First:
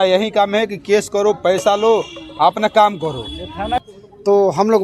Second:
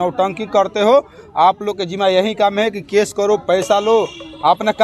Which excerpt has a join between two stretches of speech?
first; 1 cut; at 3.8 s

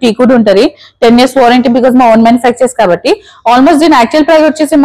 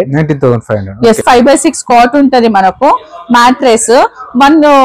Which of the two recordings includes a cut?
second; 1 cut; at 1.2 s

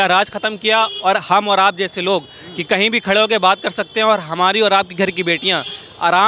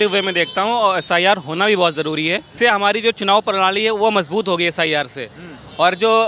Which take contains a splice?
second; 1 cut; at 2.5 s

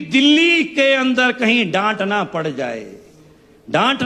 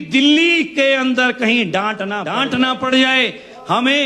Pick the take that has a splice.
second; 1 cut; at 2.3 s

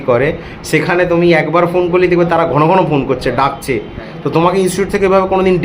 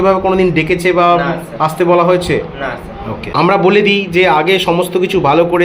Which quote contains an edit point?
second; 1 cut; at 3.3 s

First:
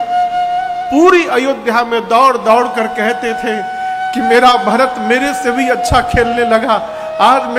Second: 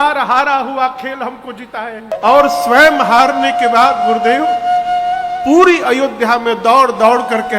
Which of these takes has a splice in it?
second; 1 cut; at 2.1 s

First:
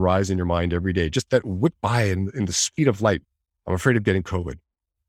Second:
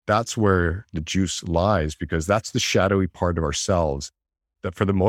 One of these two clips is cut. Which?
first; 1 cut; at 3.3 s

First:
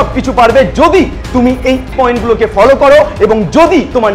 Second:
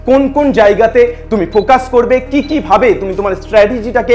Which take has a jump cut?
first; 1 cut; at 1.9 s

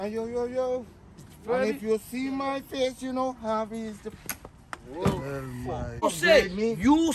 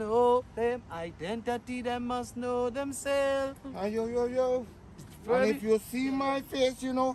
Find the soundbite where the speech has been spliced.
first; 1 cut; at 6.0 s

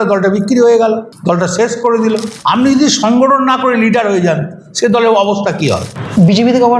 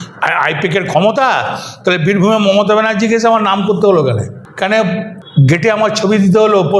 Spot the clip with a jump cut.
first; 2 cuts; at 2.3 s, 5.9 s

